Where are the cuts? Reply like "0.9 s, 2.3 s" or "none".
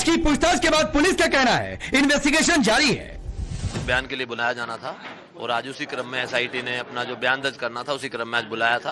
none